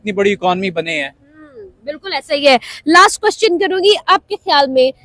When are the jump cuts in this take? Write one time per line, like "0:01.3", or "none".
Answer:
none